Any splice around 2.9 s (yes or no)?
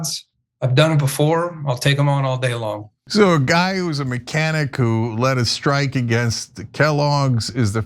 yes